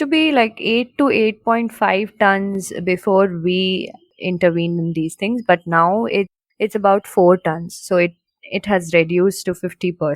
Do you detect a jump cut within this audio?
yes; 2 cuts; at 4.1 s, 6.4 s

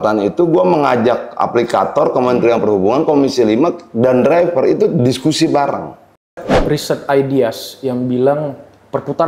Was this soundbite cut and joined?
yes; 1 cut; at 6.5 s

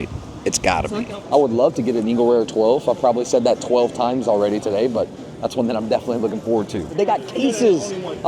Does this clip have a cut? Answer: yes; 2 cuts; at 1.1 s, 6.9 s

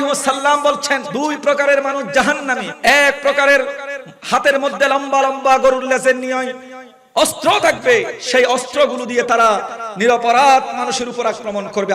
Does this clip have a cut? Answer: yes; 2 cuts; at 1.1 s, 2.6 s

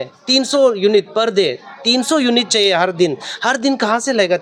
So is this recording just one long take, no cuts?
yes; 0 cuts

